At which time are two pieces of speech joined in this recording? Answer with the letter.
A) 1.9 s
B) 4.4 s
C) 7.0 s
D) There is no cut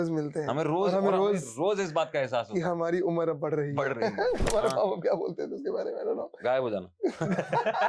B